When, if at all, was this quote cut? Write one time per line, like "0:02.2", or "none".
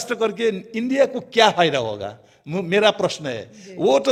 none